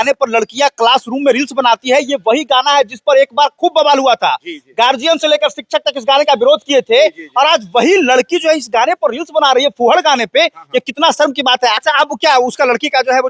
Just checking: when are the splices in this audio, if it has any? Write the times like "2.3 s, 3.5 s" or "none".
11.8 s